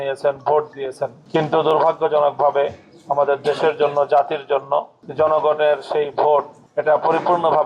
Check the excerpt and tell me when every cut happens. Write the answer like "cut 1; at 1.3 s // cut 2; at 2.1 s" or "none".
cut 1; at 1.2 s // cut 2; at 5.0 s // cut 3; at 6.6 s